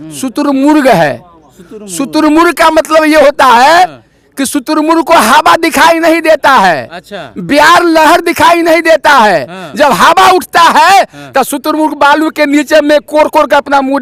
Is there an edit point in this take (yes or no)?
no